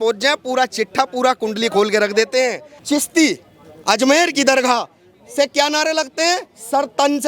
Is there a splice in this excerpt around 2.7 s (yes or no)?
yes